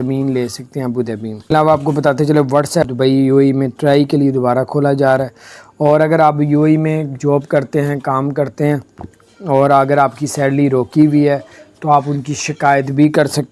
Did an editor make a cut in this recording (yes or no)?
yes